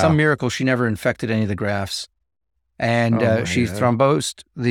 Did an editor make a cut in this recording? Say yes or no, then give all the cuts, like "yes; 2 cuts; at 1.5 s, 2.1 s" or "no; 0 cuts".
no; 0 cuts